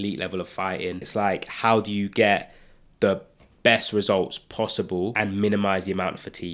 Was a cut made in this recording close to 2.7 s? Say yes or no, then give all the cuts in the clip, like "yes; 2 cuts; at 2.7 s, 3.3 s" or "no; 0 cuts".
no; 2 cuts; at 1.1 s, 5.1 s